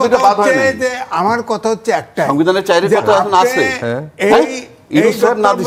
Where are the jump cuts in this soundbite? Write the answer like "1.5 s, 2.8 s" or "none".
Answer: none